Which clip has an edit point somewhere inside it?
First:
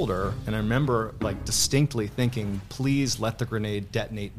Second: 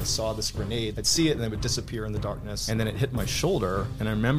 second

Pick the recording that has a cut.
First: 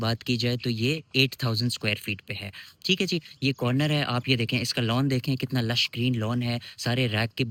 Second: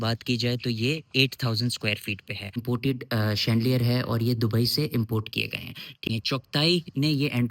second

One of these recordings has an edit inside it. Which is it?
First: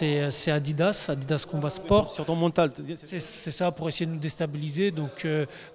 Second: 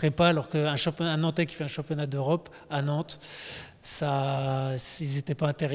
first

